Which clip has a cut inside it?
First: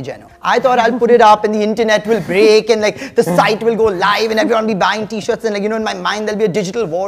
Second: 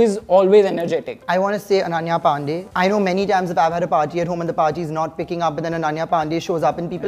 second; 2 cuts; at 1.1 s, 2.6 s

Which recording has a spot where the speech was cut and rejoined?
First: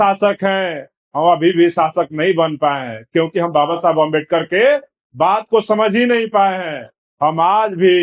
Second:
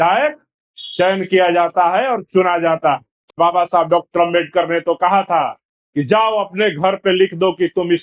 second; 1 cut; at 3.3 s

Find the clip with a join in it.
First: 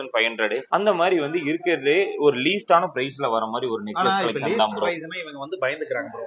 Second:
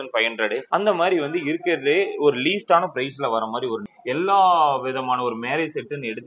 second; 1 cut; at 3.9 s

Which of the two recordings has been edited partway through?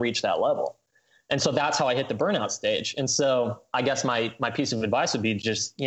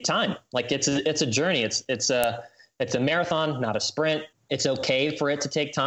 second; 1 cut; at 4.3 s

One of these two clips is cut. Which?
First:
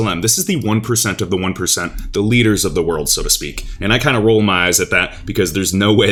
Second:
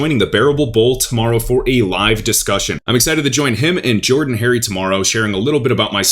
second; 1 cut; at 2.8 s

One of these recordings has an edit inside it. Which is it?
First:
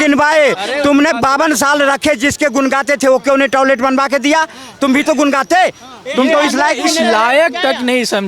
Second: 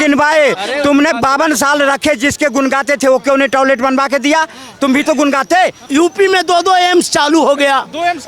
second; 1 cut; at 5.8 s

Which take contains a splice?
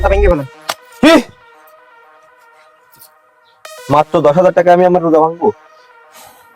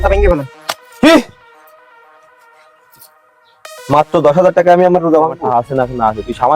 second; 1 cut; at 5.4 s

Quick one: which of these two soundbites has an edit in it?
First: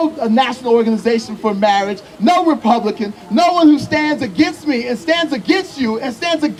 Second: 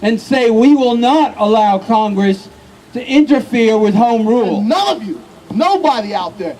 second; 1 cut; at 4.6 s

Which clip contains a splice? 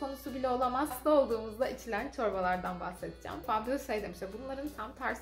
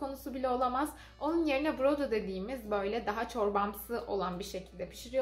first; 2 cuts; at 1.0 s, 3.4 s

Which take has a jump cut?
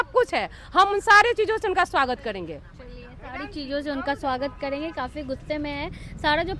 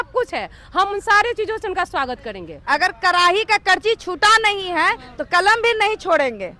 second; 1 cut; at 2.5 s

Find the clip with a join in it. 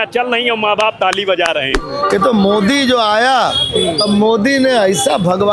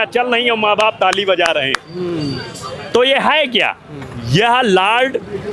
first; 1 cut; at 1.9 s

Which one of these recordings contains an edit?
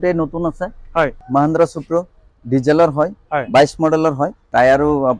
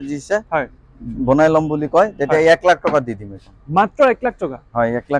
first; 2 cuts; at 1.2 s, 4.4 s

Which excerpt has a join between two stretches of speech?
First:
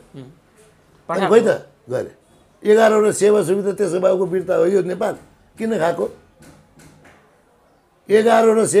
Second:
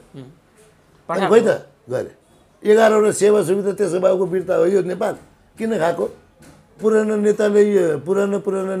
second; 1 cut; at 6.8 s

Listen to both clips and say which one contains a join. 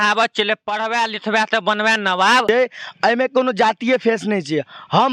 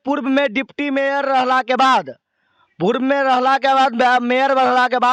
first; 1 cut; at 2.4 s

